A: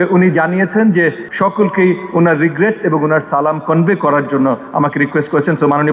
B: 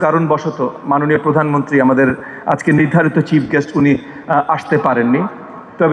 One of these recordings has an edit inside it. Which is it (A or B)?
A